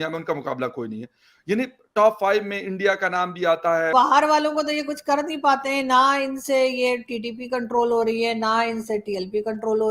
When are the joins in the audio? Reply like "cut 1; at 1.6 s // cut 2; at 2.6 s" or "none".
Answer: cut 1; at 3.9 s